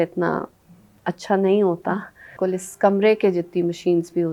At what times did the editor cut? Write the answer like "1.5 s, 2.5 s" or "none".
2.3 s